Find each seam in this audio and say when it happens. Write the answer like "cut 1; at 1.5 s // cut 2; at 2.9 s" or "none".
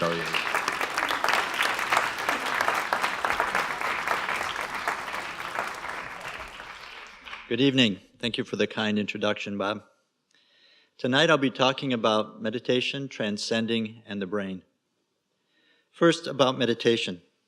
cut 1; at 5.8 s